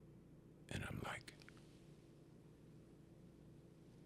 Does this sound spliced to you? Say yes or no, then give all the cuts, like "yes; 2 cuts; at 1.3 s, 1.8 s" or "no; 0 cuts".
no; 0 cuts